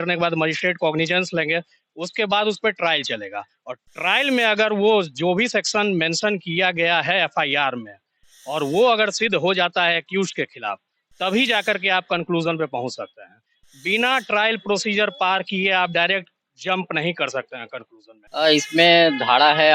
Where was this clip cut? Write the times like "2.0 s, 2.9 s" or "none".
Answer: 18.3 s